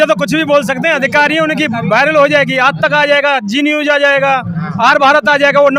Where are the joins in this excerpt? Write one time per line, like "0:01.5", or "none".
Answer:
none